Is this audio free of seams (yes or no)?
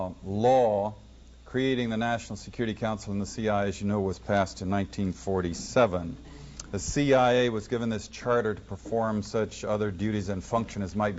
no